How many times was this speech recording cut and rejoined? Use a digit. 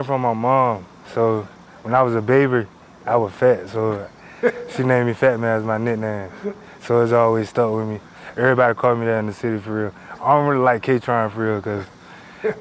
0